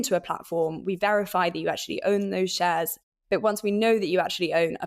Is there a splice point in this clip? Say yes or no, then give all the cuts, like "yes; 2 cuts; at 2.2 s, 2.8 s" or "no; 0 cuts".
yes; 1 cut; at 3.0 s